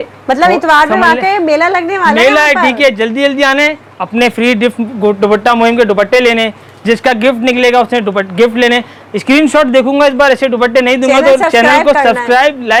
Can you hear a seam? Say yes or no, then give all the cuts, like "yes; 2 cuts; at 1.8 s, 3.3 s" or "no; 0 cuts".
no; 0 cuts